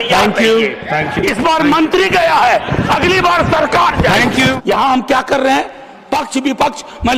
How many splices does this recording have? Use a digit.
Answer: 1